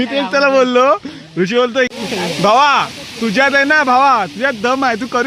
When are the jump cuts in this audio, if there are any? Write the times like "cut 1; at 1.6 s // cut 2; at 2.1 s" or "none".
cut 1; at 1.9 s

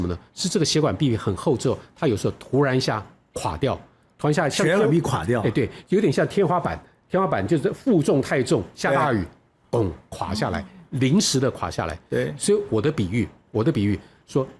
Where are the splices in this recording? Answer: none

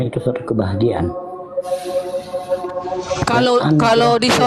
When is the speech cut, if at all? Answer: none

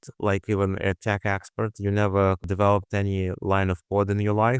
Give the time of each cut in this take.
cut 1; at 2.5 s

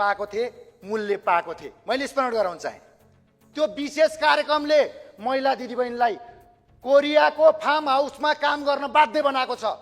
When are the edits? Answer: cut 1; at 3.4 s

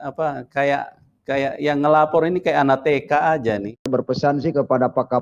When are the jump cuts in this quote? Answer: cut 1; at 3.9 s

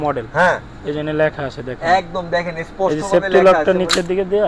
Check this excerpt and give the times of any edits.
none

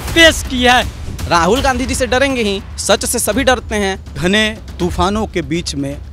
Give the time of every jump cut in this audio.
cut 1; at 1.0 s // cut 2; at 2.7 s // cut 3; at 4.2 s

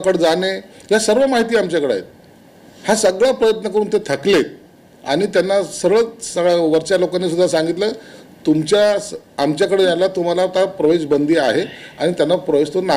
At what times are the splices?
none

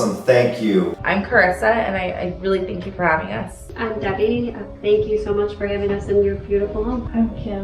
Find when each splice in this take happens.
cut 1; at 1.0 s // cut 2; at 3.6 s

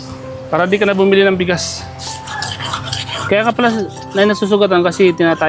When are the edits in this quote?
cut 1; at 2.2 s

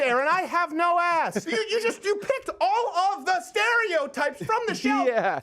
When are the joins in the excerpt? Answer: cut 1; at 1.4 s

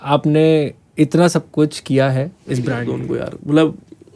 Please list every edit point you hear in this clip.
cut 1; at 2.9 s

